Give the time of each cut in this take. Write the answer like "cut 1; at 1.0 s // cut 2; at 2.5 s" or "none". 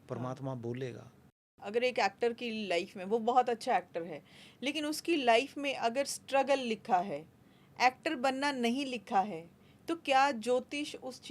cut 1; at 1.5 s